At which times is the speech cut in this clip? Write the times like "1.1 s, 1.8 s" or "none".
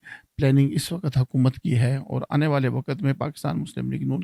none